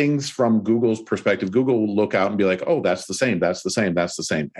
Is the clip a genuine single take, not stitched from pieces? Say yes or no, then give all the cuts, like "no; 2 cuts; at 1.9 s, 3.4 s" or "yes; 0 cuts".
yes; 0 cuts